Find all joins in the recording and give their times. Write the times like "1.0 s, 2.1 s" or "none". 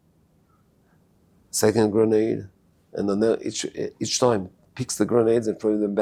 none